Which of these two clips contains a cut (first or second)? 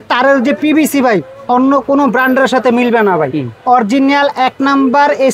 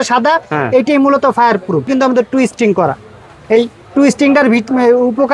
second